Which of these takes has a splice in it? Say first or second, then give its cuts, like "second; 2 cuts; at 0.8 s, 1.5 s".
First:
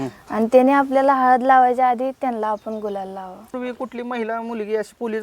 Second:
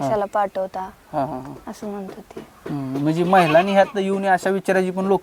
first; 1 cut; at 3.6 s